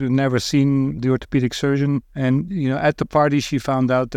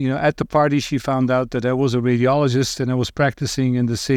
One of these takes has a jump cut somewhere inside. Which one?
first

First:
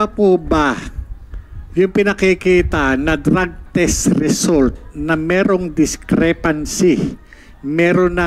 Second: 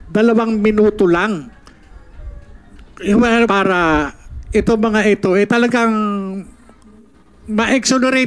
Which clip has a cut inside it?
second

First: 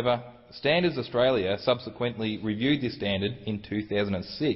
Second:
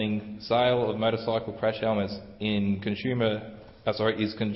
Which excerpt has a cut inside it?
second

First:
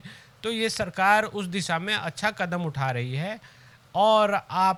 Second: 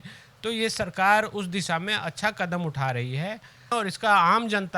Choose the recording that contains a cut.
second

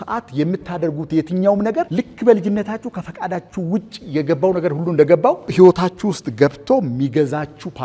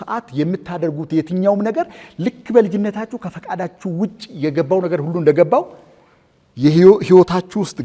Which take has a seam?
first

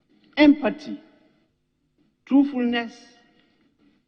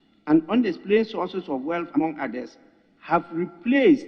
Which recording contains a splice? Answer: second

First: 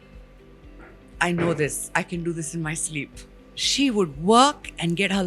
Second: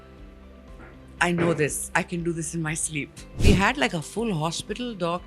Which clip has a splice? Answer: second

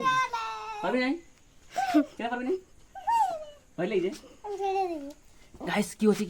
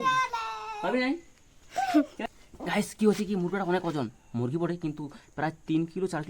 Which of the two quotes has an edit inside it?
second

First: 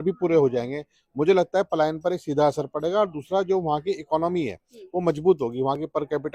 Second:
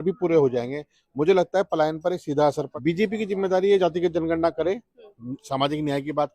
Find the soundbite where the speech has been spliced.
second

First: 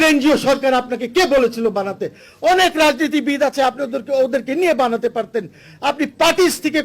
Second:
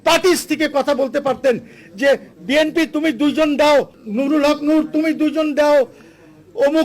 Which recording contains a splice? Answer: second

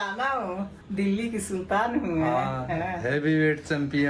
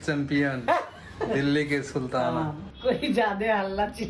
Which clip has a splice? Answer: second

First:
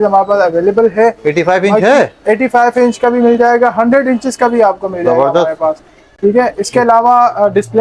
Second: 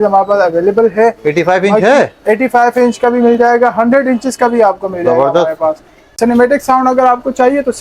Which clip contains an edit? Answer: second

